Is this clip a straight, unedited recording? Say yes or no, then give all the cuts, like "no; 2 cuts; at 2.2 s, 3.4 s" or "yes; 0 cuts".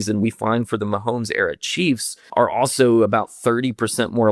no; 1 cut; at 2.1 s